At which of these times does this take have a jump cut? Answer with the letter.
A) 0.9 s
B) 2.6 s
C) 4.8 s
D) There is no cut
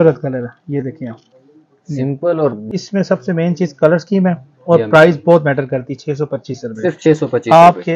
B